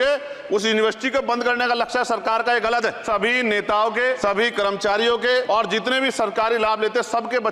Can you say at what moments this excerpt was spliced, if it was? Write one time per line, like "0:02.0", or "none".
0:03.0
0:04.2
0:05.5